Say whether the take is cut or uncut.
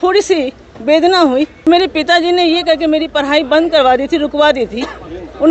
cut